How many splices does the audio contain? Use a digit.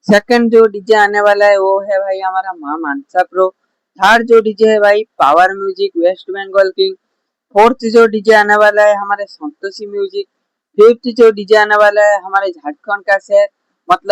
0